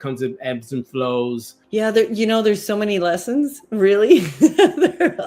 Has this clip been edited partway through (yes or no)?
yes